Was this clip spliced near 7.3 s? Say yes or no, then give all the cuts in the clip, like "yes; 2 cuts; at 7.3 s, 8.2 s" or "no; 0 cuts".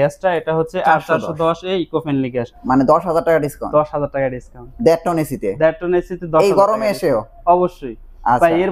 no; 1 cut; at 2.5 s